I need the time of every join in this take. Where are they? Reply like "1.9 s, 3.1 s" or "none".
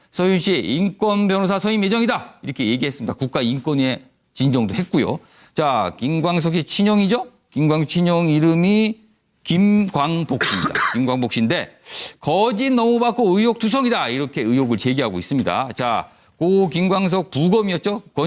5.4 s